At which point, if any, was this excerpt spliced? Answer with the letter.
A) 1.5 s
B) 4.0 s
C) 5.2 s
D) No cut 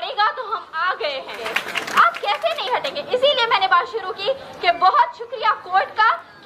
A